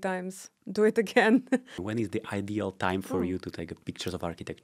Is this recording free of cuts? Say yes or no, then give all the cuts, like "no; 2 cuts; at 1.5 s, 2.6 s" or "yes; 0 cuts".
no; 2 cuts; at 1.7 s, 3.7 s